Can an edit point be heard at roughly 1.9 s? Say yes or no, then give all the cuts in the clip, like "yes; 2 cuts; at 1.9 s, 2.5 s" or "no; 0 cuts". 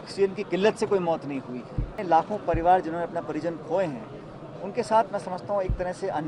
yes; 1 cut; at 1.9 s